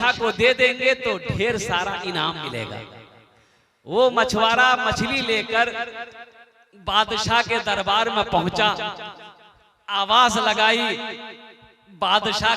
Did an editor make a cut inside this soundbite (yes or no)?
no